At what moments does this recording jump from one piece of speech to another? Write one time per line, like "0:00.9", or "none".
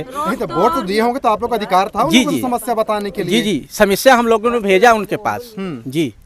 none